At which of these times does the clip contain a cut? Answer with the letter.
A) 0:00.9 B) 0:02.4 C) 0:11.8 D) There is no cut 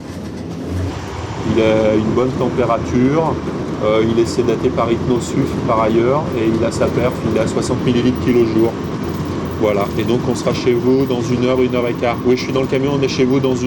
A